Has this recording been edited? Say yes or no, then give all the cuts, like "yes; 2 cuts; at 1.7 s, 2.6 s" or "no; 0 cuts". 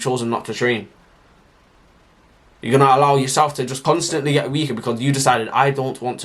yes; 1 cut; at 3.8 s